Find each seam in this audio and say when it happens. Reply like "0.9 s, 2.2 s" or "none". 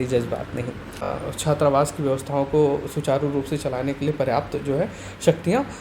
1.1 s